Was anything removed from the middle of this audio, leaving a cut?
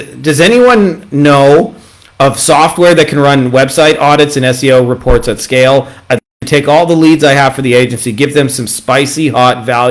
no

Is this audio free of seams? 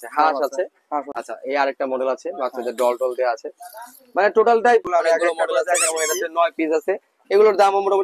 no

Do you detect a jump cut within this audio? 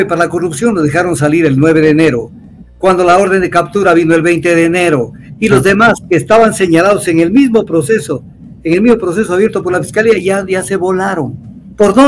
no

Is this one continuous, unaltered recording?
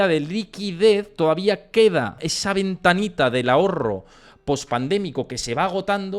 no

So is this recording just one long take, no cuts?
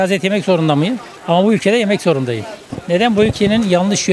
yes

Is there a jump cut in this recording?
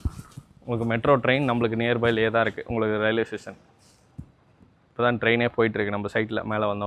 no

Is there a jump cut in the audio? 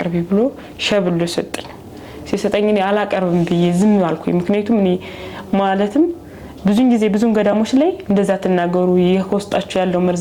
no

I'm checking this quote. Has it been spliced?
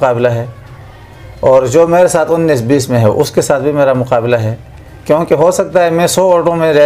no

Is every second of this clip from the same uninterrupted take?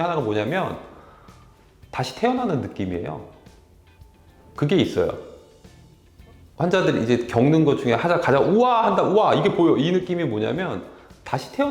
yes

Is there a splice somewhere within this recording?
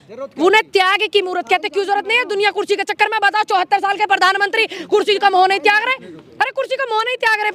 no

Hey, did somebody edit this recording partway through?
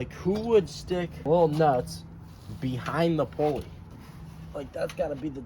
yes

